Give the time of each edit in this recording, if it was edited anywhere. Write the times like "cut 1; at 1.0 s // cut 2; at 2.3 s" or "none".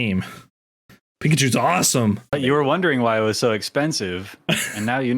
cut 1; at 2.3 s